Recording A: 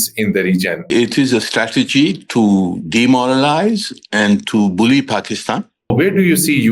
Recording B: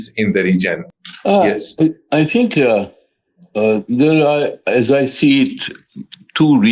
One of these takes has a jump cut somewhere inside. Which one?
A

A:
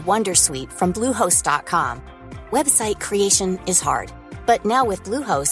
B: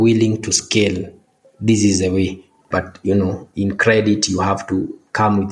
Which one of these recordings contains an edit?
B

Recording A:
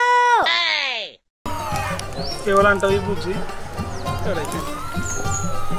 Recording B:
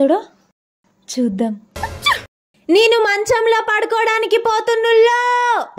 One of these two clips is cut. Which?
A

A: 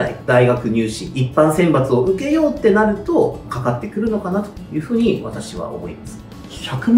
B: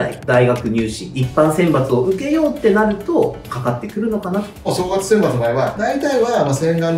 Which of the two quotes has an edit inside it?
B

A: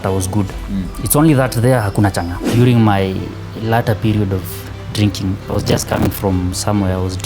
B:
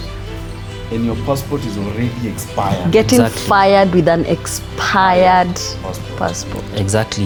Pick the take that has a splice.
A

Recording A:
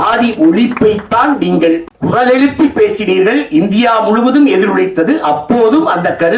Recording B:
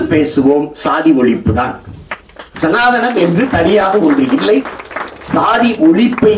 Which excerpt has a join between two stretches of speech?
A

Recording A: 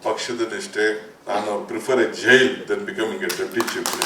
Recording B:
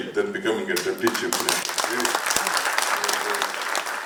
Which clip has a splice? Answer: A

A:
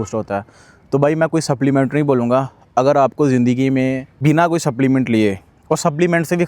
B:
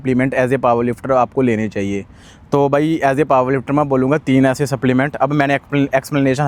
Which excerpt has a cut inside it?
A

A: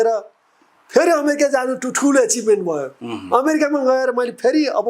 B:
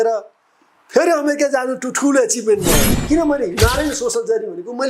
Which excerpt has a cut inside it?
B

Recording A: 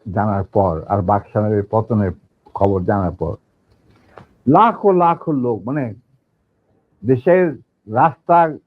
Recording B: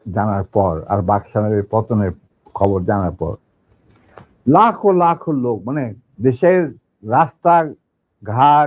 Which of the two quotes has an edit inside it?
B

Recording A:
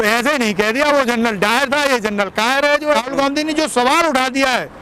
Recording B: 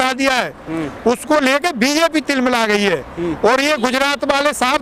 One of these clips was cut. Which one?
A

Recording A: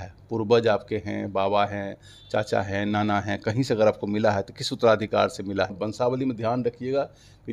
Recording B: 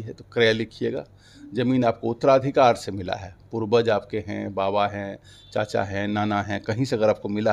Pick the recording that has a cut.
A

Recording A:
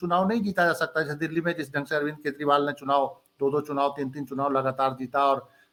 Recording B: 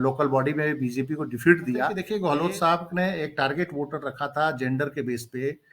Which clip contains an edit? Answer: B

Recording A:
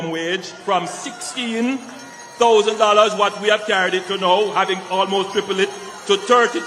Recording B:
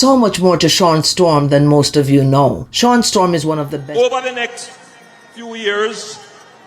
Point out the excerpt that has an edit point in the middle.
B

